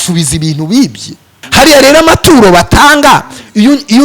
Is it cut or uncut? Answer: cut